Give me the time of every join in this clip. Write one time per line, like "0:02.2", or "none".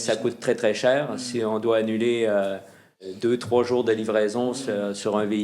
0:03.0